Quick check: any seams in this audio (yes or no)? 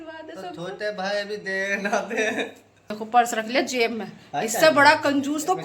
yes